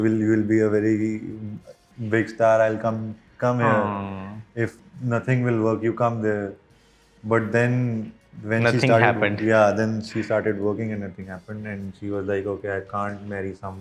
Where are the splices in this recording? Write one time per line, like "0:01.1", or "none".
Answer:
none